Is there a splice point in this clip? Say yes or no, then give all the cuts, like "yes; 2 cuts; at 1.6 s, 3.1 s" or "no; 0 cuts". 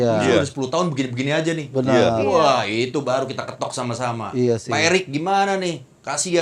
no; 0 cuts